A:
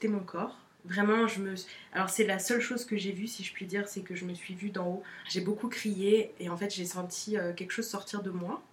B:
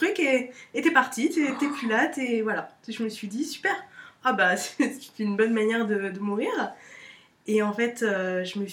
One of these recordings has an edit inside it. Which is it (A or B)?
A